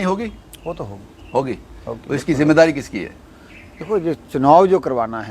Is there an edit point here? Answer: no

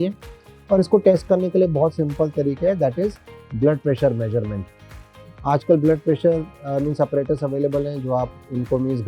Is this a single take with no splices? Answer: yes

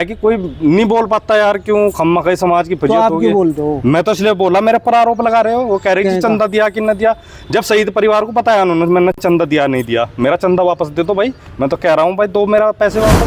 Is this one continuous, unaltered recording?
yes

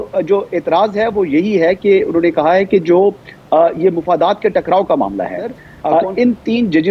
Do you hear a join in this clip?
yes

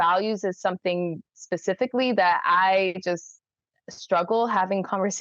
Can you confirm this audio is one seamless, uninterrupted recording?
yes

